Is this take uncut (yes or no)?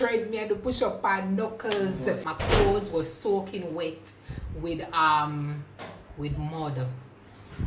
no